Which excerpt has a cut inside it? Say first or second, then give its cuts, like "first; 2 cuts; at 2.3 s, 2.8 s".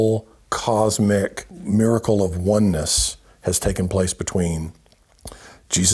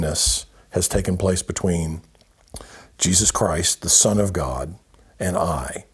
first; 1 cut; at 1.5 s